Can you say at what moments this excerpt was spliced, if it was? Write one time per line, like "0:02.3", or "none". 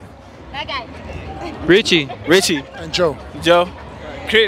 none